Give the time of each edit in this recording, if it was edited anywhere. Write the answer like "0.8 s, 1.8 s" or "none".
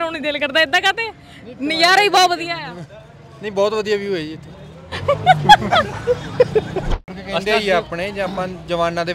7.0 s